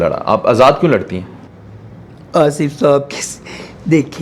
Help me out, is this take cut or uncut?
uncut